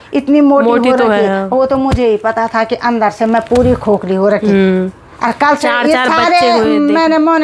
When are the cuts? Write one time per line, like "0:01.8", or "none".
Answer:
none